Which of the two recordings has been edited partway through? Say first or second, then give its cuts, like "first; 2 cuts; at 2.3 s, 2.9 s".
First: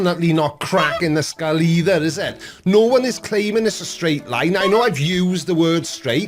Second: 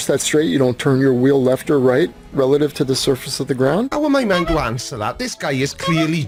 first; 1 cut; at 2.4 s